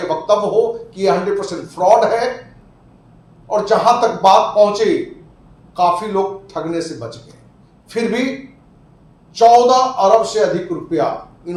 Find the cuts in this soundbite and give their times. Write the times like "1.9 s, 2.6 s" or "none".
none